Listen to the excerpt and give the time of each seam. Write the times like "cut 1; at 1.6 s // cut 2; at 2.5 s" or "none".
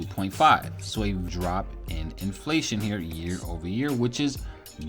cut 1; at 1.2 s